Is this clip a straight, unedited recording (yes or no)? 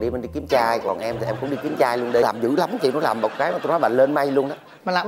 no